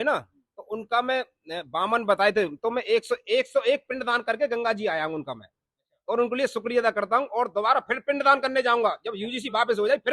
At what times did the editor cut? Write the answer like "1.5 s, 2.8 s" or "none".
none